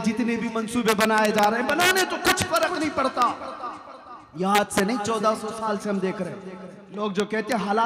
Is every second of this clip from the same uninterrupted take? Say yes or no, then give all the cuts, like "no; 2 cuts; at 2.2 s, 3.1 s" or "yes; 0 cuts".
yes; 0 cuts